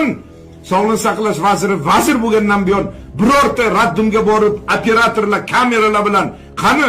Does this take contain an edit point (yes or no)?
no